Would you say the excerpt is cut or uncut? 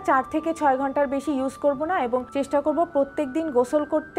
uncut